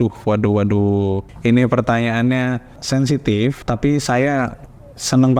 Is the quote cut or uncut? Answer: uncut